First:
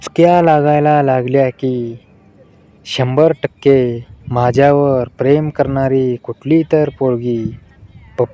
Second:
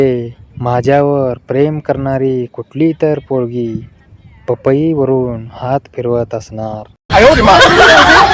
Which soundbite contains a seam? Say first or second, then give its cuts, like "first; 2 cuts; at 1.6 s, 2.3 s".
second; 1 cut; at 6.9 s